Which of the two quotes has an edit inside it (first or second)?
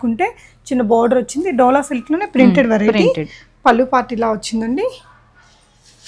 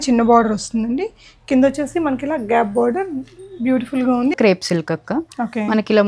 second